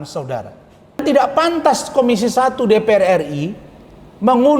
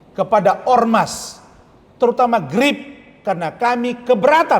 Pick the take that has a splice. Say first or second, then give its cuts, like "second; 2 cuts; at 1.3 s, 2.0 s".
first; 1 cut; at 1.0 s